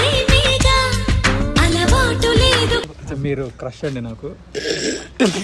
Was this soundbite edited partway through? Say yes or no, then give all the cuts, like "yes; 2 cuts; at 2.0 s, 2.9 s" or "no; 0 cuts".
yes; 1 cut; at 3.0 s